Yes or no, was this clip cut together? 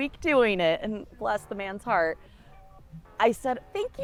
no